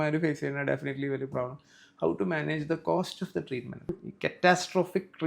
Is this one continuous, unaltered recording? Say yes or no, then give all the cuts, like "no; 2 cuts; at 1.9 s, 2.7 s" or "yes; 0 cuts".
no; 1 cut; at 4.0 s